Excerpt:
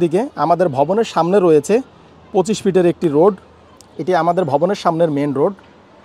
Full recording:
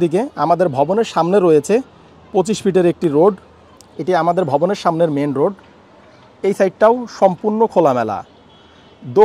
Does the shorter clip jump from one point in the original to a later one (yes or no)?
no